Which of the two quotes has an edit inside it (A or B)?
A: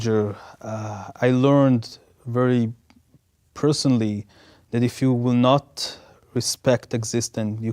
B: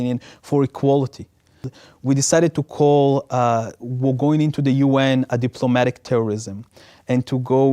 B